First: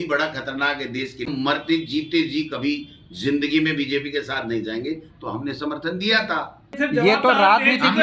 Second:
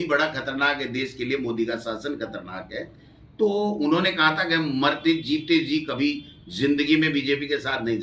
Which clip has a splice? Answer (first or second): first